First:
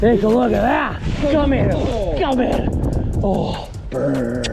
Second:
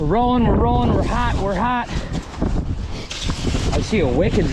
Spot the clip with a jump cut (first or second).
first